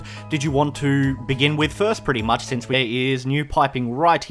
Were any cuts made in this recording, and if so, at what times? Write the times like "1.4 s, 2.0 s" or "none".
none